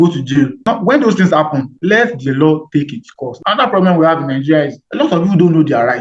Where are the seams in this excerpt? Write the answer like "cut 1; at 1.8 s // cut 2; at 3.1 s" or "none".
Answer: cut 1; at 3.4 s